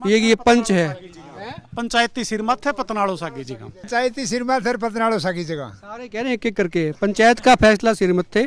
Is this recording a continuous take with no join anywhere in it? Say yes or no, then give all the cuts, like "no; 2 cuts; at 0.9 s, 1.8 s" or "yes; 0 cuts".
no; 1 cut; at 3.7 s